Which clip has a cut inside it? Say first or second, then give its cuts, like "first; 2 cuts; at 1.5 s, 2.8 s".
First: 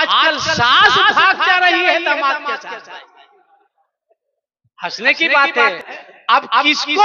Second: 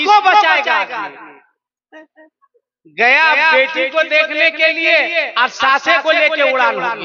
first; 1 cut; at 5.9 s